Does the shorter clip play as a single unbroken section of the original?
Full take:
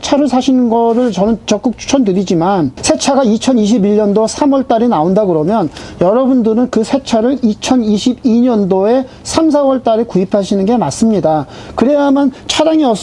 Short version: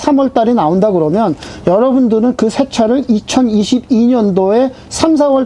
yes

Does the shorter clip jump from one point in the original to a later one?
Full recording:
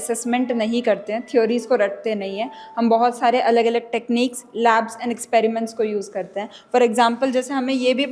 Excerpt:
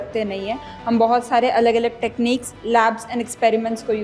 no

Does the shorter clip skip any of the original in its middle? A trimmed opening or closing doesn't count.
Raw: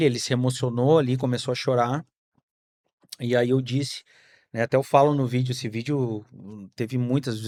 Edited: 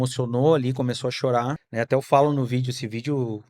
yes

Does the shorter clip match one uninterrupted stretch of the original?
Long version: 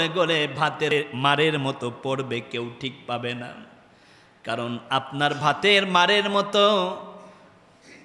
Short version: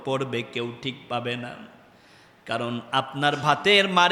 yes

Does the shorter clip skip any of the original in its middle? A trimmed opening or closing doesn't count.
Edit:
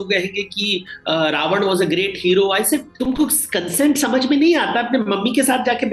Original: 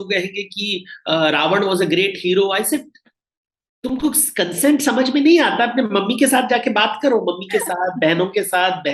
yes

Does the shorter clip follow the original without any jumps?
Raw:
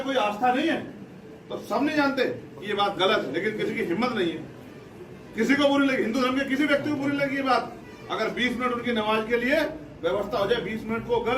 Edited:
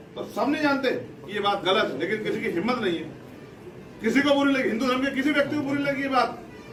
yes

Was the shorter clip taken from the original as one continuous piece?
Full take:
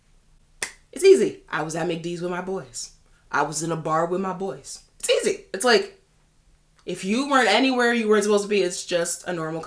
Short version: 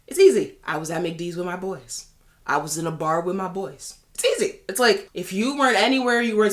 no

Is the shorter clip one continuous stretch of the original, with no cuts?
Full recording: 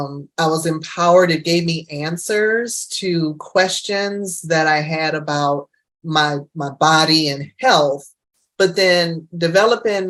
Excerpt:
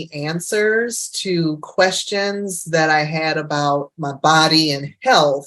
no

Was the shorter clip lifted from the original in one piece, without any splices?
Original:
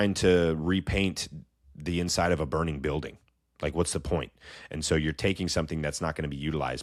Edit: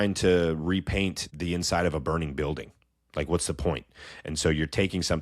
no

